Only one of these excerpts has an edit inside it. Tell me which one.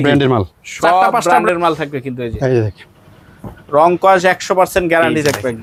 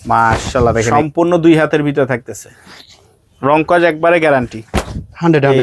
second; 1 cut; at 0.9 s

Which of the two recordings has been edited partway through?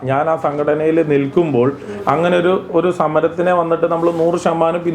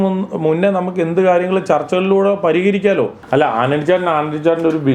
second; 1 cut; at 3.2 s

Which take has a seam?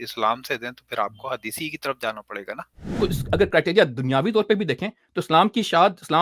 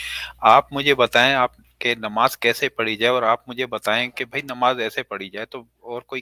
first; 1 cut; at 2.9 s

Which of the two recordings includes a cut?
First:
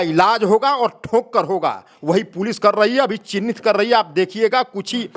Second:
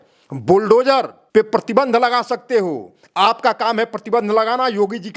second; 1 cut; at 1.2 s

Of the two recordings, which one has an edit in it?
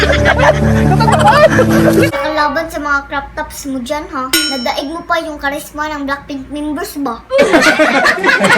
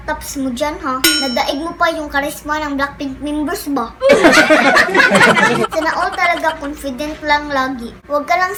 first; 1 cut; at 2.1 s

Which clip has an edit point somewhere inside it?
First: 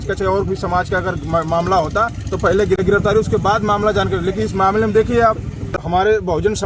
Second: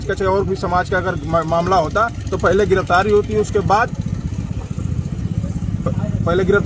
first; 2 cuts; at 2.8 s, 5.8 s

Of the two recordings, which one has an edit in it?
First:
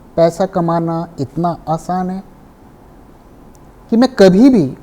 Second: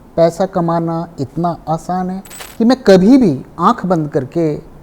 second; 1 cut; at 2.4 s

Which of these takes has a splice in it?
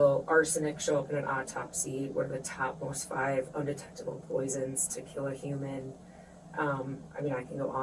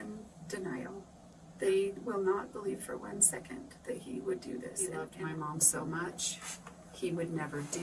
second; 1 cut; at 5.1 s

